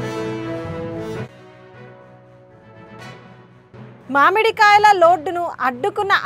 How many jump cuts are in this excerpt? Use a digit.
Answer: 1